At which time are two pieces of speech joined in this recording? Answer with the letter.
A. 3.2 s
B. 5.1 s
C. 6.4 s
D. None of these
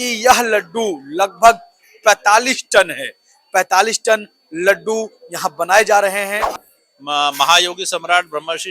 C